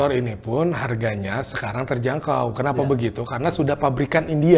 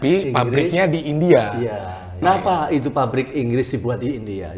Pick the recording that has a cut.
second; 1 cut; at 2.2 s

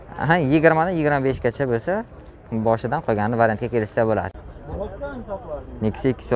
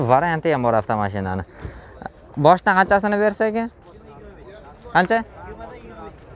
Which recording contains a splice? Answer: first; 1 cut; at 4.3 s

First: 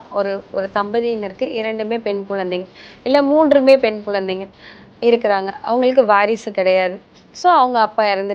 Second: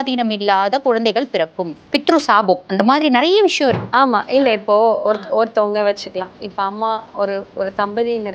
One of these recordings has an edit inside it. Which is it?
second; 2 cuts; at 1.8 s, 3.8 s

